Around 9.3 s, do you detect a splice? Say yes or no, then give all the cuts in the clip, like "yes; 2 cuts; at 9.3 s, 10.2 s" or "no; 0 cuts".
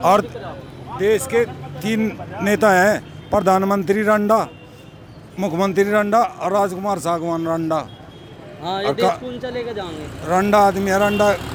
no; 0 cuts